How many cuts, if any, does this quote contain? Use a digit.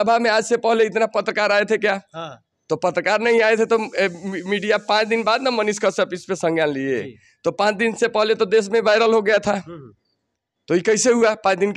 0